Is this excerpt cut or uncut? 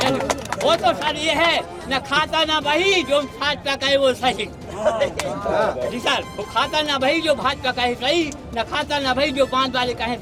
uncut